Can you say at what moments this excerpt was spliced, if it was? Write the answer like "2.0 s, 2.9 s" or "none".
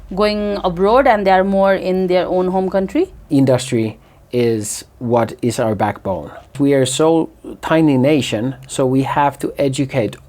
3.2 s, 6.5 s